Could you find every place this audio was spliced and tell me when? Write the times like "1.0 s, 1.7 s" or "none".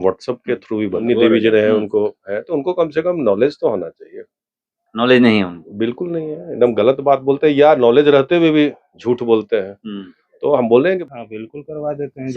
1.0 s, 11.0 s

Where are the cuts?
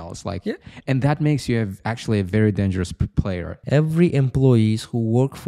3.5 s

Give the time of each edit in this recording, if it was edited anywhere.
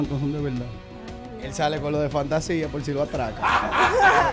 none

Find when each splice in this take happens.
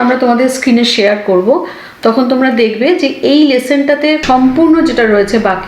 4.2 s

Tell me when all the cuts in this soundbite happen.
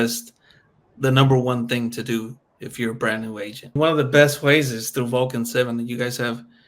3.8 s

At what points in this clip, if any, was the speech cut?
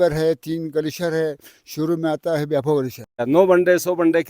3.2 s

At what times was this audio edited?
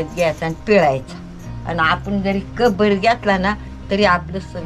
none

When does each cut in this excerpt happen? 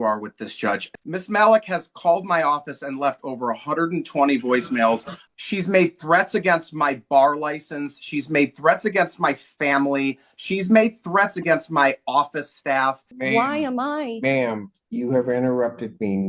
0.9 s, 5.1 s, 13.2 s

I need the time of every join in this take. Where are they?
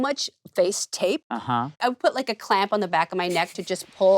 1.8 s

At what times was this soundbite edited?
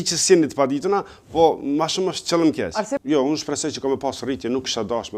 2.9 s

